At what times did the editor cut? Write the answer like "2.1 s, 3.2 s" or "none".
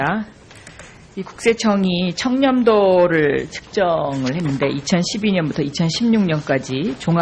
none